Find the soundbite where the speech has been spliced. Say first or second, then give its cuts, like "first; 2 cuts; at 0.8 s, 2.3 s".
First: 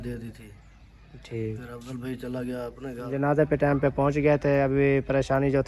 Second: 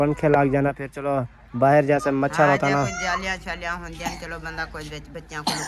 first; 1 cut; at 3.1 s